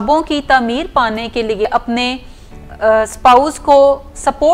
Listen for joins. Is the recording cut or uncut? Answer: cut